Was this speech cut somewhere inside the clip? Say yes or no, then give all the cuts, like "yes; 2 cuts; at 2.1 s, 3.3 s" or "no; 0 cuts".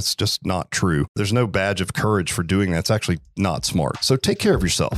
yes; 2 cuts; at 1.2 s, 4.0 s